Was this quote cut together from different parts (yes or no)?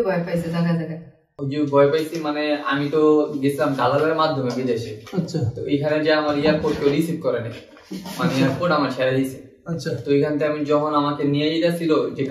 no